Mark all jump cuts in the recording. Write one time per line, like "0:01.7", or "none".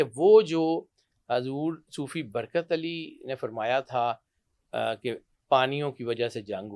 none